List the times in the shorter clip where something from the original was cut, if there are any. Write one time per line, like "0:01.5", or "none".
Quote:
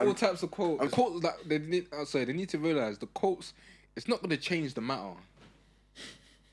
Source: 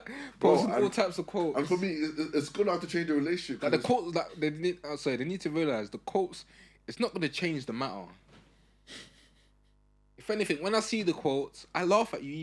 0:00.9